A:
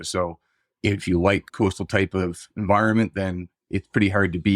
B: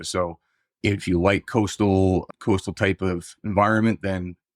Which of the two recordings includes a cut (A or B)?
A